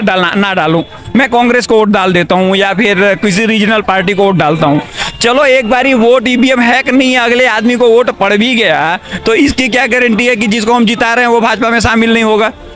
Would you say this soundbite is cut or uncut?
uncut